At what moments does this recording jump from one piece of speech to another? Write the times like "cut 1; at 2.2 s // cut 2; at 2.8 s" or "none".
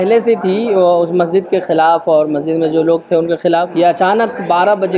cut 1; at 3.7 s